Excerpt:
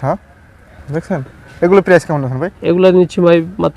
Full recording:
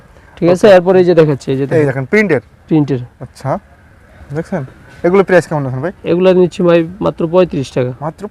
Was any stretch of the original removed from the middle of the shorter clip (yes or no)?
no